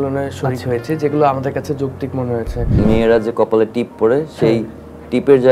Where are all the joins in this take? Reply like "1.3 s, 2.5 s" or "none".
2.8 s